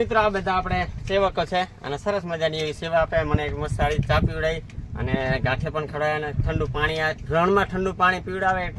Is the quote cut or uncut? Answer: uncut